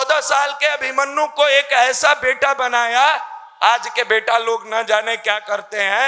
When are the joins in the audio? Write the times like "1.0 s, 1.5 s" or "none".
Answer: none